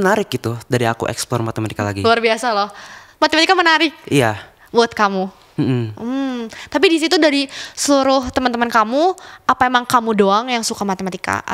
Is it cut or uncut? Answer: uncut